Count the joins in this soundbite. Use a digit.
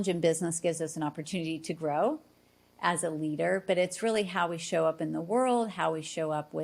0